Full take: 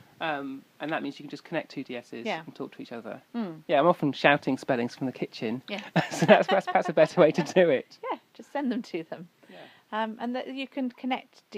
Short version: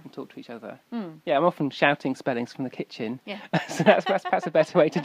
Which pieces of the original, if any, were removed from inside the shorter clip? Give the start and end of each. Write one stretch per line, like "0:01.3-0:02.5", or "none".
none